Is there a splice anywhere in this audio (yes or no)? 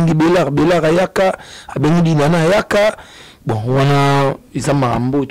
no